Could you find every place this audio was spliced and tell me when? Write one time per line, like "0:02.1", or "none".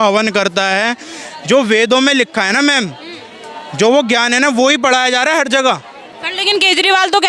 none